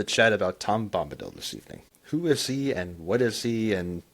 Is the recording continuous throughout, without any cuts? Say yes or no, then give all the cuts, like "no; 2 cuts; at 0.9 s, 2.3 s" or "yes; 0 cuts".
no; 1 cut; at 1.9 s